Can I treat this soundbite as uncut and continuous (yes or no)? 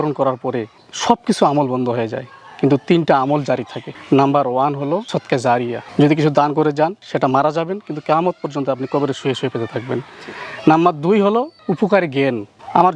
yes